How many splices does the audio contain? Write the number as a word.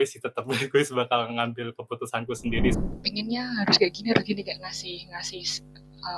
one